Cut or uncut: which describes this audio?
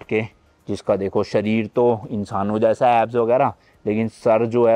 uncut